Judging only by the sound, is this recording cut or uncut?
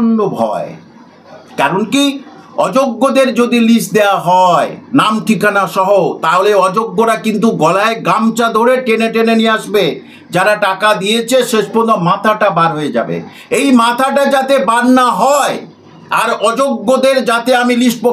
uncut